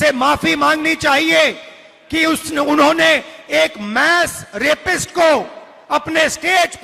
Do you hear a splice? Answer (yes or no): no